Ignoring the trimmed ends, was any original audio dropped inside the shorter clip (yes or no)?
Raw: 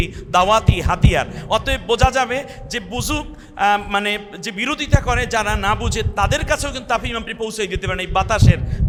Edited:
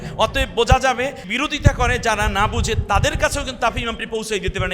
yes